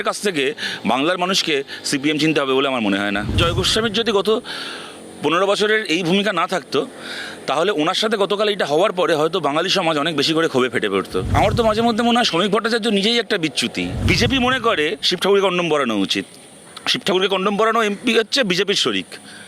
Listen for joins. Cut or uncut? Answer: cut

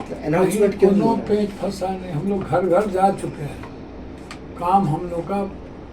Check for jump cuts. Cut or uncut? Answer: uncut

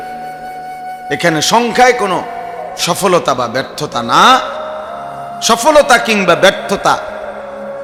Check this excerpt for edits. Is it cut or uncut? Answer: uncut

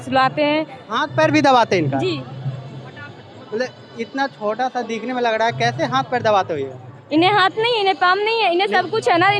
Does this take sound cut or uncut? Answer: uncut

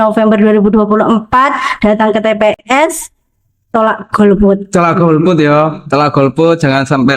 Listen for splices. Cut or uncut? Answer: uncut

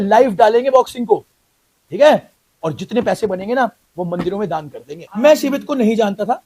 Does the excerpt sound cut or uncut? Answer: cut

